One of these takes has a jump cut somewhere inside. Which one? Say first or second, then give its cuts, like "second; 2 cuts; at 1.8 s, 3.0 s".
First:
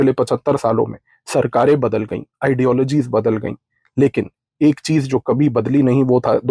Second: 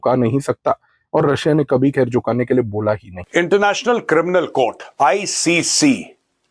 second; 1 cut; at 3.1 s